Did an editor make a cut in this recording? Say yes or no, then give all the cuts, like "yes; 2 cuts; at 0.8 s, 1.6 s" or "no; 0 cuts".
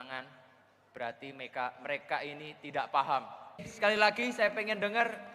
yes; 1 cut; at 3.7 s